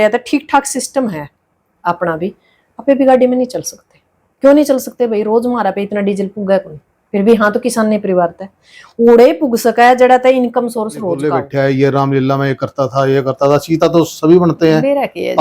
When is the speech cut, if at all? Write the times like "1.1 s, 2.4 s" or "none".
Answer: 11.4 s